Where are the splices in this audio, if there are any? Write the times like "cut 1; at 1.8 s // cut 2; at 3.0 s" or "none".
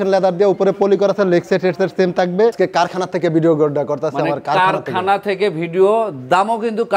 cut 1; at 2.5 s